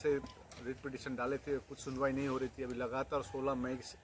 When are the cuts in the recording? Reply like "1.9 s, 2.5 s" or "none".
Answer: none